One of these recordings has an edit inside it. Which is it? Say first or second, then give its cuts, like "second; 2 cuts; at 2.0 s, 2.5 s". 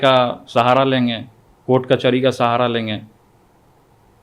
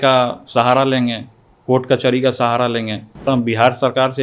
second; 1 cut; at 3.3 s